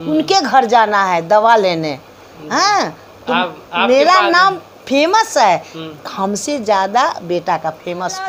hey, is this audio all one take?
yes; 0 cuts

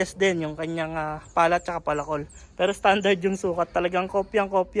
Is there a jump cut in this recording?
no; 0 cuts

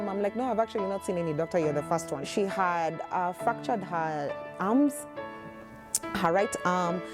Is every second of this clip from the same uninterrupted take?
no; 1 cut; at 2.2 s

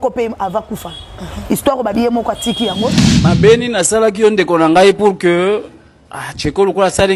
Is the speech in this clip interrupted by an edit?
yes; 1 cut; at 2.9 s

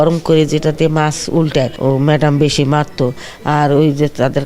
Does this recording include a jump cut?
yes; 1 cut; at 1.7 s

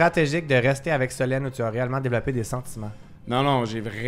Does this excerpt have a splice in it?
no; 0 cuts

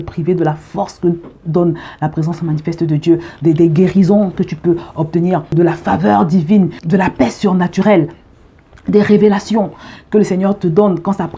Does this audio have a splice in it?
yes; 2 cuts; at 5.5 s, 6.8 s

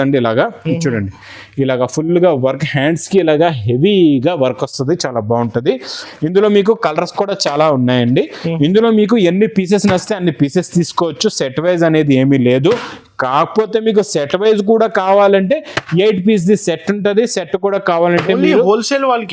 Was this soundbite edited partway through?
no; 0 cuts

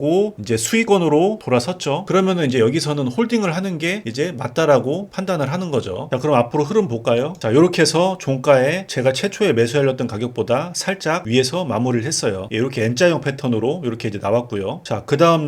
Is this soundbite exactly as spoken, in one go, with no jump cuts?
no; 3 cuts; at 2.0 s, 6.0 s, 12.4 s

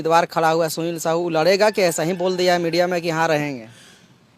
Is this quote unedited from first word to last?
yes; 0 cuts

